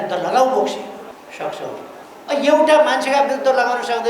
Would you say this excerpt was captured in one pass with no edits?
no; 2 cuts; at 1.1 s, 2.0 s

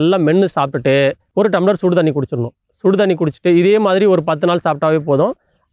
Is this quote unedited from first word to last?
no; 1 cut; at 1.2 s

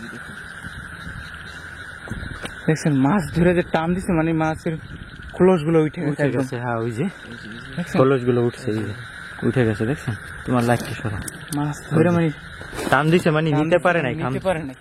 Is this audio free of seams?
yes; 0 cuts

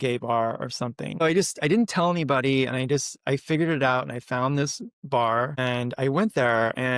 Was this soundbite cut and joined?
yes; 2 cuts; at 1.2 s, 5.6 s

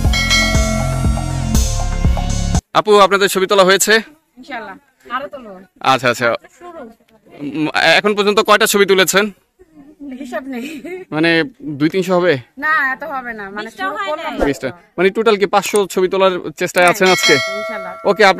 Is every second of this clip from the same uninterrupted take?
no; 1 cut; at 2.6 s

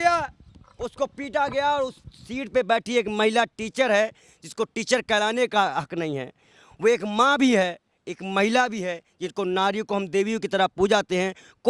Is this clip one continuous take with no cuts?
yes; 0 cuts

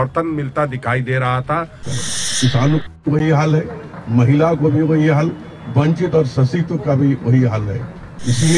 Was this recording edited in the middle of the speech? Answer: yes; 1 cut; at 1.8 s

